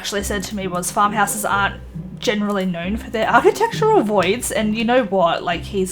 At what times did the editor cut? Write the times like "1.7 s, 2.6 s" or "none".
none

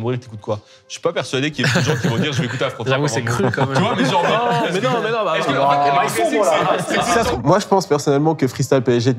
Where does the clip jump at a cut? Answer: 7.3 s

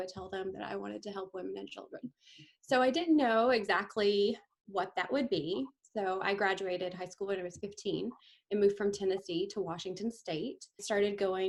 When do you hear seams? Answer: none

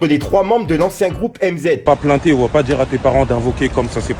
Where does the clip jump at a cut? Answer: 1.8 s

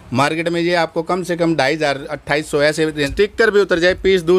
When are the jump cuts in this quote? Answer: 3.1 s

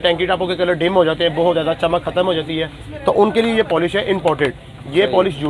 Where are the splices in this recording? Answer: none

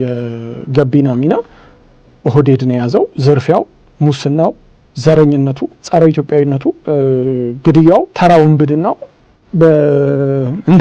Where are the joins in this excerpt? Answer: 3.2 s, 5.7 s, 6.8 s, 8.1 s

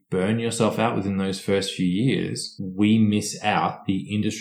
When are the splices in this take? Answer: 2.5 s

